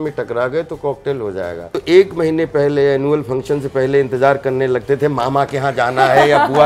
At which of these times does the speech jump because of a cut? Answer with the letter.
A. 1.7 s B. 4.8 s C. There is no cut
A